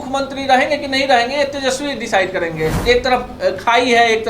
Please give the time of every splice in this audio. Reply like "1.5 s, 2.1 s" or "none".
2.8 s

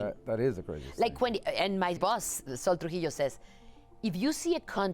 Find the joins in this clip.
2.0 s

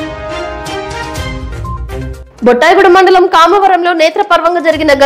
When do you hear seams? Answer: 2.2 s

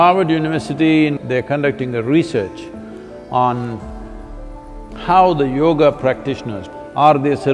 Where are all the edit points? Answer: 1.2 s, 6.6 s

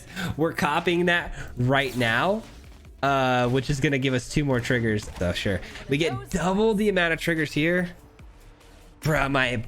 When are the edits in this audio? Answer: 5.1 s

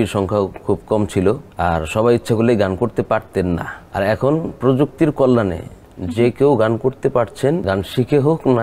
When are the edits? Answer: 1.5 s, 3.8 s, 7.6 s

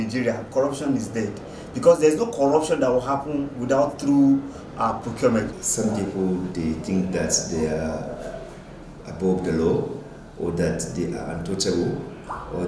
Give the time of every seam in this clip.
5.5 s

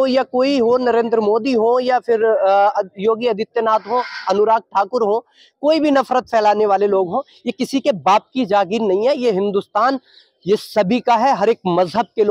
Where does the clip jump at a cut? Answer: none

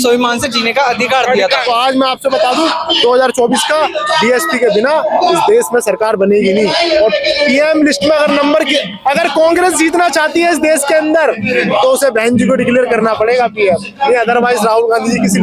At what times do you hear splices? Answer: 1.6 s

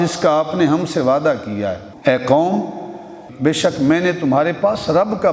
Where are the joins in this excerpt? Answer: 1.9 s, 3.2 s

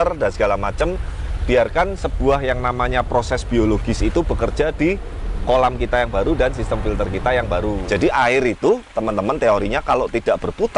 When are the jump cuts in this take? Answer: 7.8 s

